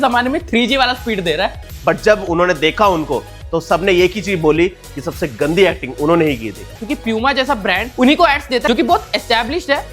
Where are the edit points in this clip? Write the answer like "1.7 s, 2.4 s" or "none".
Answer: 1.5 s, 6.7 s